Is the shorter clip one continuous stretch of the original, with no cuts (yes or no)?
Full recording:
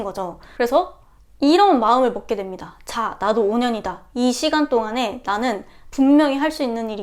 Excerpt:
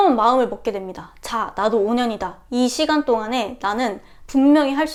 yes